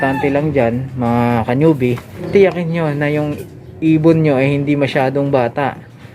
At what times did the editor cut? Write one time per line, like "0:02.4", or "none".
0:02.1